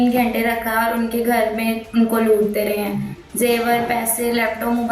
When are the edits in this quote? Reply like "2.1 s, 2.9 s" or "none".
none